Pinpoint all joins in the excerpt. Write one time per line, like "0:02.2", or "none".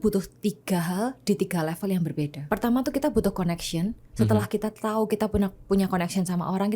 0:02.4

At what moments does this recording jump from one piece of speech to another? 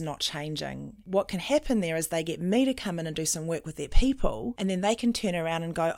0:01.0
0:04.5

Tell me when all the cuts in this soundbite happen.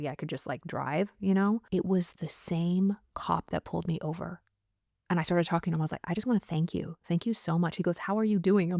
0:01.6

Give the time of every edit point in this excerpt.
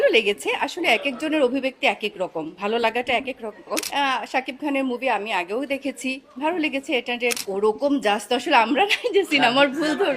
0:03.9
0:07.4

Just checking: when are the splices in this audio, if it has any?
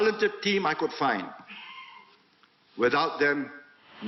none

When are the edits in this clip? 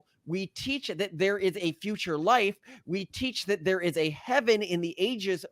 none

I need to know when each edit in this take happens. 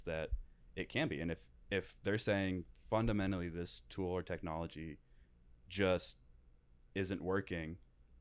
none

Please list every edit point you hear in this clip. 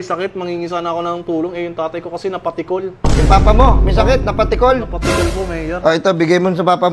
none

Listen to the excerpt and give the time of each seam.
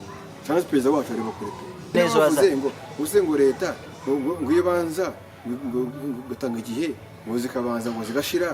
0:01.9

